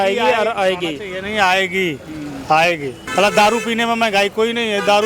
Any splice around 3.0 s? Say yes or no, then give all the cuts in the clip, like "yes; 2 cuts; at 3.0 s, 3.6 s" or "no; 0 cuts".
yes; 1 cut; at 3.0 s